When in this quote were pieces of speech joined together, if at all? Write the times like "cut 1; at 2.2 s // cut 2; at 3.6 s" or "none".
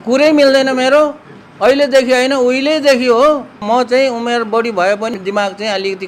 cut 1; at 3.5 s // cut 2; at 5.1 s